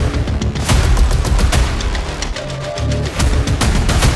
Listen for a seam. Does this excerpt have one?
no; 0 cuts

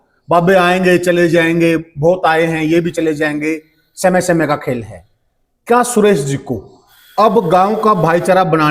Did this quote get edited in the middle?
no; 0 cuts

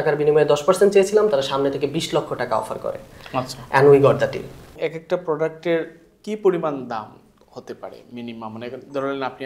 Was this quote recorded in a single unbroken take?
yes; 0 cuts

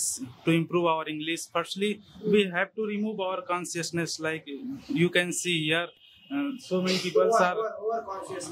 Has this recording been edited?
no; 0 cuts

